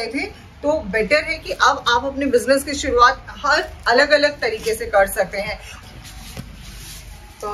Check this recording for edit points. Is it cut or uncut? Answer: cut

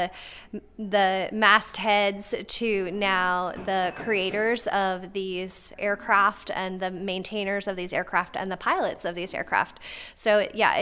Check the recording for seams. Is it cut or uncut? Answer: cut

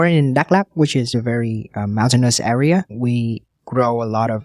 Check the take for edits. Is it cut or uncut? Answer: cut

